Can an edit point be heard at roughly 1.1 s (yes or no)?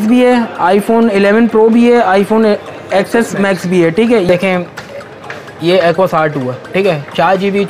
no